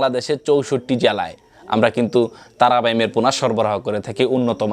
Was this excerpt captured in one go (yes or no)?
yes